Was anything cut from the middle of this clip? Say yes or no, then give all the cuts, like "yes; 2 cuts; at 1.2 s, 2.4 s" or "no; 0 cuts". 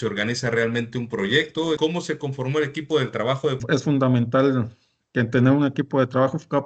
yes; 2 cuts; at 1.8 s, 3.6 s